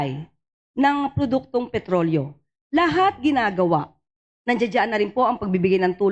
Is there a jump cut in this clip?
no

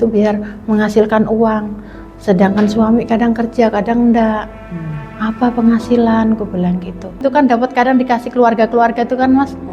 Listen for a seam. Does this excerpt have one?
yes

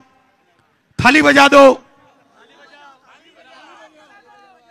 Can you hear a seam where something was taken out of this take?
no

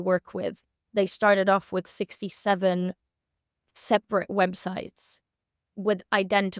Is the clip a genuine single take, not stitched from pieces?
yes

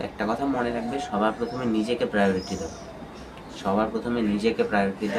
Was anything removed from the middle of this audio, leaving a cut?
no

